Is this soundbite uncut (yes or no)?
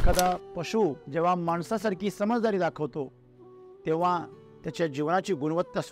no